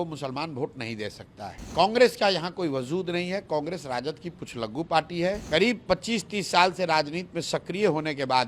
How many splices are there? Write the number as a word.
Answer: two